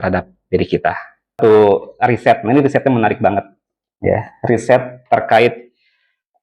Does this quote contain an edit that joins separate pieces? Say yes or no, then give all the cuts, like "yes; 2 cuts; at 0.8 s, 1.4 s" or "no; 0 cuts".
yes; 1 cut; at 1.4 s